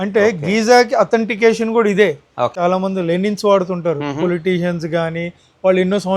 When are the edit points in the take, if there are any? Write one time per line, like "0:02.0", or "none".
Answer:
0:02.5